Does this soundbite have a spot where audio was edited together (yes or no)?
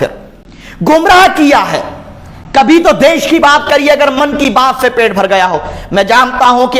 no